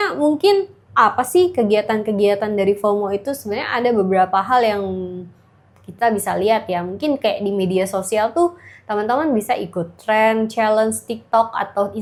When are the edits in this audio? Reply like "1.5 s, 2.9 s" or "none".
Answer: none